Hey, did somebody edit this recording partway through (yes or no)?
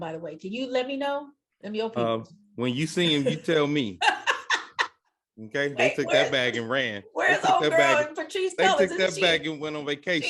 no